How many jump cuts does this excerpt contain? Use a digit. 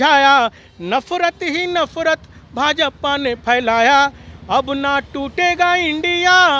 0